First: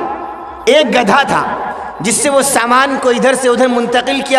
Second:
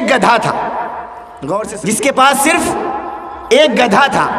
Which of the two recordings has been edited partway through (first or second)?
second